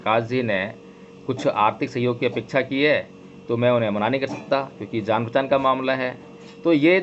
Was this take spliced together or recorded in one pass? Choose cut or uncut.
uncut